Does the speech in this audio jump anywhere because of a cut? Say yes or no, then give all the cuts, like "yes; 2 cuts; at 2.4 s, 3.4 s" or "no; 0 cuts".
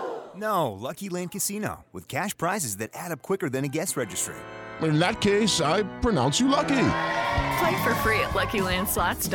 no; 0 cuts